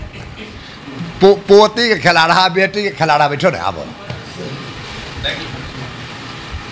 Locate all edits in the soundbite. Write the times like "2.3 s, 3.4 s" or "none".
none